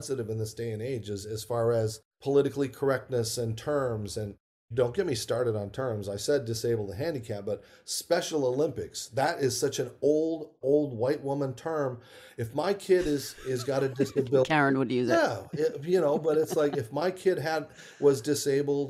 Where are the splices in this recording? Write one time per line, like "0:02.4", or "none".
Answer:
0:02.1